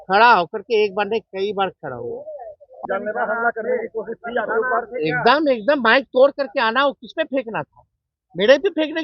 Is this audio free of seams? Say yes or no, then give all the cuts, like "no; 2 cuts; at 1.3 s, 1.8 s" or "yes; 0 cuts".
no; 1 cut; at 2.8 s